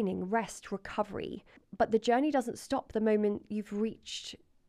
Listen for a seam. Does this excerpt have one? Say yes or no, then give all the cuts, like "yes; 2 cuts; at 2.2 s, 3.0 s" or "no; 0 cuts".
yes; 1 cut; at 1.6 s